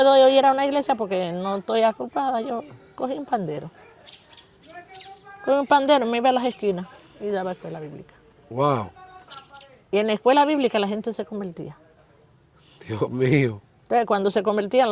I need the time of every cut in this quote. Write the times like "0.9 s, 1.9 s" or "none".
none